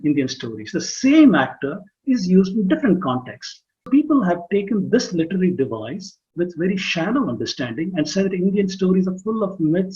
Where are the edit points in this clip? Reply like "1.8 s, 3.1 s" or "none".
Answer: 3.9 s

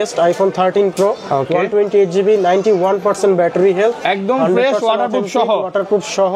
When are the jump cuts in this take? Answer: none

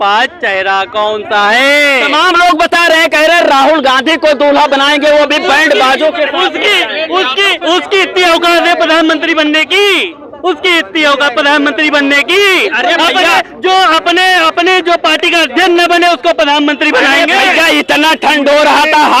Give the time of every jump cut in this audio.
none

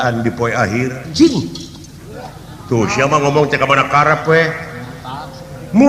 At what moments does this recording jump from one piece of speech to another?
1.1 s

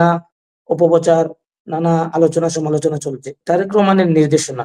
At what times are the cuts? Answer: 3.4 s

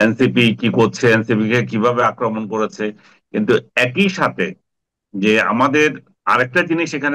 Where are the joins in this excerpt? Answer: 6.1 s

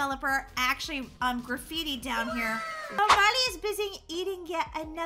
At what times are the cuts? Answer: 3.0 s

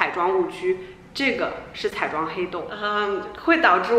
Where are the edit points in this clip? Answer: 2.8 s

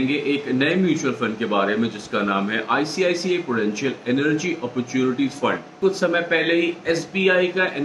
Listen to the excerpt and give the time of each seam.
5.8 s

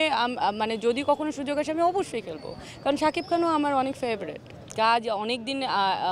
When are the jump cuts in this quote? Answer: none

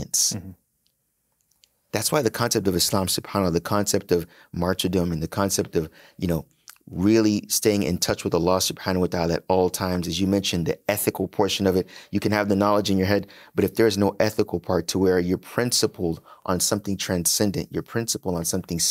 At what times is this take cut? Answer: none

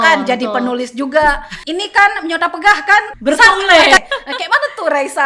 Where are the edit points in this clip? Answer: 1.5 s, 3.1 s, 4.0 s

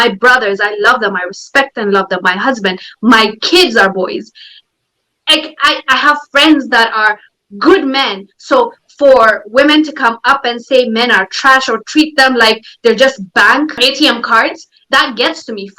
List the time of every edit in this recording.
13.8 s

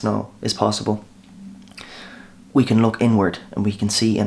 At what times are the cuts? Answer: none

